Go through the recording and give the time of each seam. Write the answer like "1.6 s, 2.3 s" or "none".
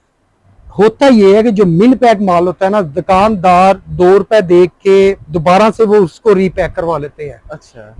none